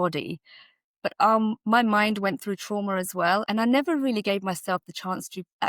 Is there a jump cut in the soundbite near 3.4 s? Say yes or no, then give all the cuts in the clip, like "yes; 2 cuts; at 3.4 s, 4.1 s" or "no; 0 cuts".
yes; 1 cut; at 3.4 s